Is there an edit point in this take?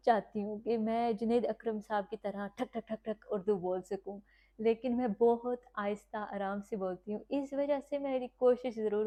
no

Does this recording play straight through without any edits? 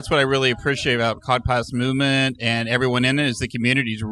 yes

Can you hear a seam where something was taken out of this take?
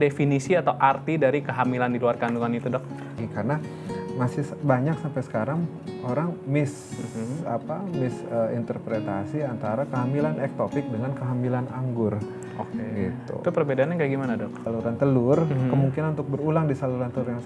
yes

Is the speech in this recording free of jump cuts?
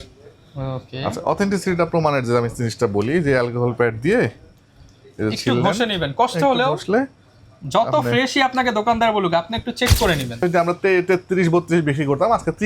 no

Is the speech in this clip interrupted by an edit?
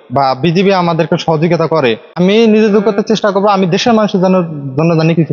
yes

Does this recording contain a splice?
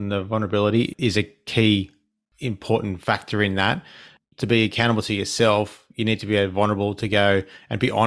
no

